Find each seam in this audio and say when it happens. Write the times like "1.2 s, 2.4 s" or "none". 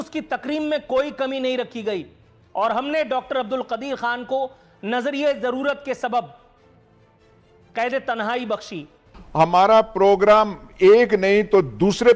9.2 s